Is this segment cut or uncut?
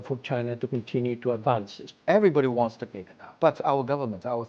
cut